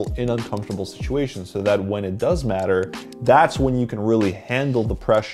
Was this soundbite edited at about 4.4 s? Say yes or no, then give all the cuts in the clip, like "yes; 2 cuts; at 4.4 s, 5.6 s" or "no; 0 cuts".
no; 1 cut; at 3.0 s